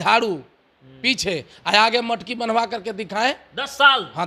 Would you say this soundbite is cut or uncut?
uncut